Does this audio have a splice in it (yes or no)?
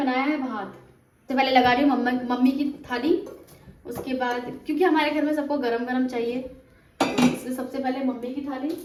no